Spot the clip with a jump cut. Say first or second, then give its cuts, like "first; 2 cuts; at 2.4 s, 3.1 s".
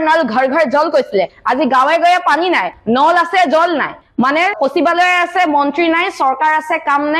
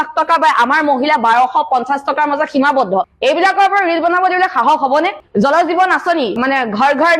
second; 2 cuts; at 3.1 s, 5.2 s